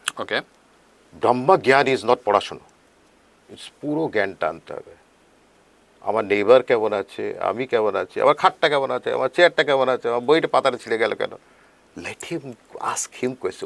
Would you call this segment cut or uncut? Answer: uncut